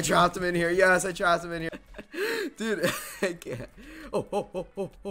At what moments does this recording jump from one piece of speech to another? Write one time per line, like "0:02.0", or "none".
0:01.7

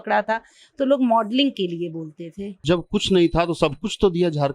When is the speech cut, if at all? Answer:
0:02.6

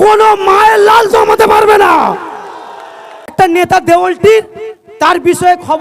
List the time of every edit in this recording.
0:03.3

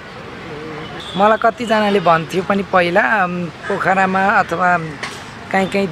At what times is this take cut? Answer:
0:00.9

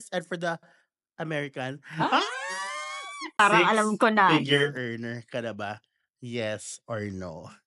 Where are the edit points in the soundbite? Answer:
0:03.3

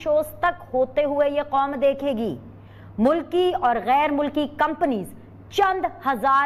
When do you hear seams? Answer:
none

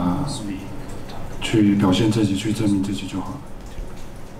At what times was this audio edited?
none

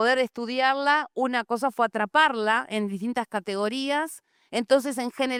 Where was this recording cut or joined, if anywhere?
none

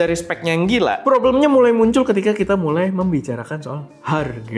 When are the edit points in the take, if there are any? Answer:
none

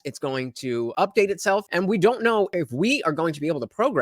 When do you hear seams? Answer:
0:00.9
0:01.7
0:02.5

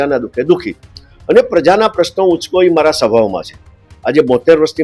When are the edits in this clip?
none

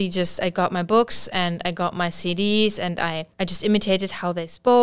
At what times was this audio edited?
0:03.2

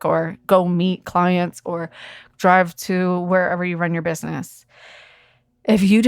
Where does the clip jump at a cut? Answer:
0:02.2

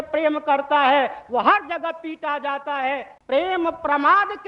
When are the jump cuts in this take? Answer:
0:03.1

